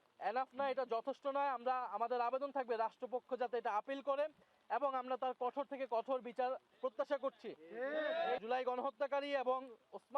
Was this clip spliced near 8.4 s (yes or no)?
yes